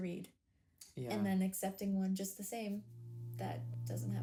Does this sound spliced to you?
no; 0 cuts

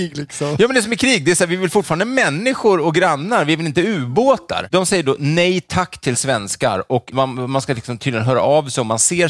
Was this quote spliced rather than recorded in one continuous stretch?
yes; 2 cuts; at 4.7 s, 7.1 s

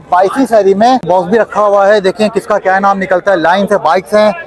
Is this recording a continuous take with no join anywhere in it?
no; 1 cut; at 1.0 s

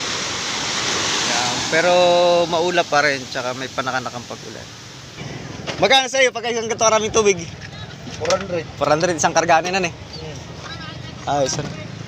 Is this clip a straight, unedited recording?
no; 1 cut; at 5.2 s

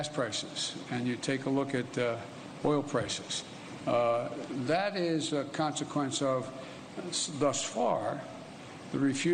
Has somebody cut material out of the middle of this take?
no; 0 cuts

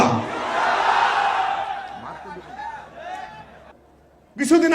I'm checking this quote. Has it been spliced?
yes; 1 cut; at 3.7 s

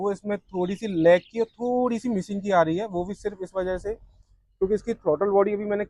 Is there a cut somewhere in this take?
no; 0 cuts

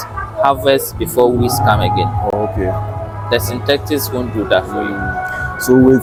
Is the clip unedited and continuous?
yes; 0 cuts

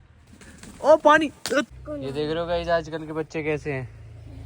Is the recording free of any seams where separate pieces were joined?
no; 1 cut; at 1.9 s

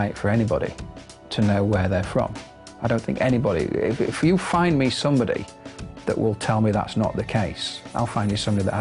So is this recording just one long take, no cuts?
yes; 0 cuts

